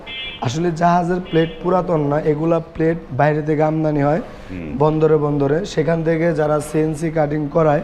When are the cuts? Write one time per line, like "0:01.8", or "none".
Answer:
none